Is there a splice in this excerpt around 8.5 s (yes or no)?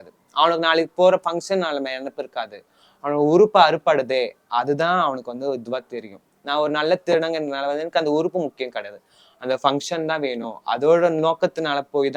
no